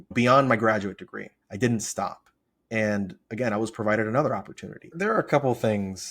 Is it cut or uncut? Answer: cut